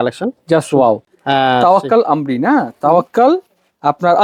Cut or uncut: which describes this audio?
uncut